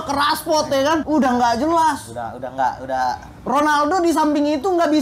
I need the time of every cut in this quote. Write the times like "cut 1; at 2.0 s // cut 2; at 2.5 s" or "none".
cut 1; at 1.0 s